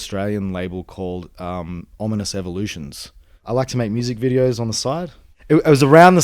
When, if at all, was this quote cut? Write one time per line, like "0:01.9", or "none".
0:03.4
0:05.3